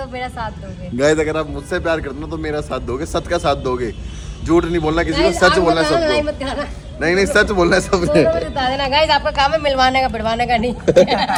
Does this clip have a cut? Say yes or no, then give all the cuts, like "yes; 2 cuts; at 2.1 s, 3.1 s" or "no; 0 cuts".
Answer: no; 0 cuts